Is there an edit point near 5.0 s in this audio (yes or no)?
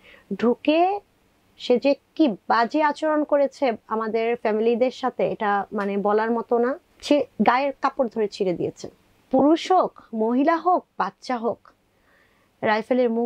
no